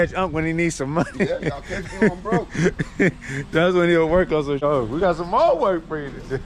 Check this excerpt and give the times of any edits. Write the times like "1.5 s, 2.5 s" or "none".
4.6 s